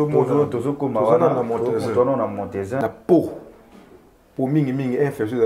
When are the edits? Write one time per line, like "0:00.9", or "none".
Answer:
0:02.8